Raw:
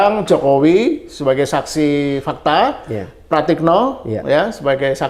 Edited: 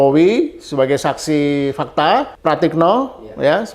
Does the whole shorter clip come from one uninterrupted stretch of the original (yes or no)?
no